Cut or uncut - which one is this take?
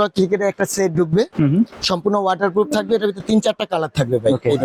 uncut